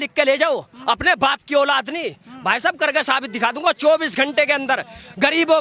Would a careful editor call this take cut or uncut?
uncut